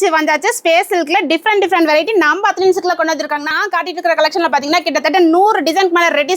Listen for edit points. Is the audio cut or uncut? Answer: cut